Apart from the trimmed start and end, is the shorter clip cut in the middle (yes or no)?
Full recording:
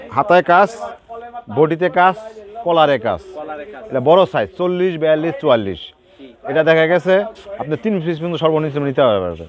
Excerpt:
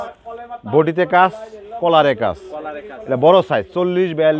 no